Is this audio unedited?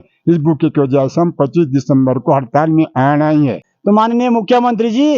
no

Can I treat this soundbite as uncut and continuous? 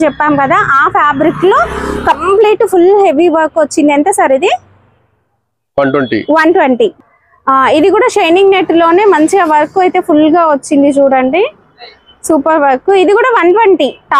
yes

